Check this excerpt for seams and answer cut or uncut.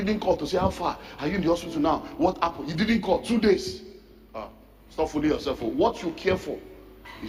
uncut